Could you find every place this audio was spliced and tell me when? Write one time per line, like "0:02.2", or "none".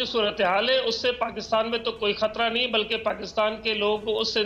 none